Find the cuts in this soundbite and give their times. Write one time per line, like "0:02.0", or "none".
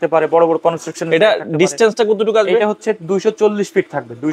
none